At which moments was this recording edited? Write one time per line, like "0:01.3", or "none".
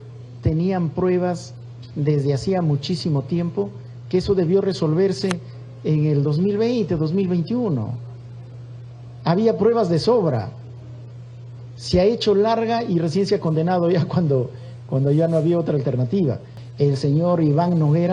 0:16.6

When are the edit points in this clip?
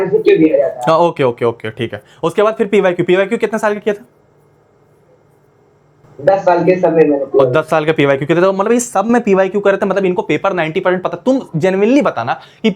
none

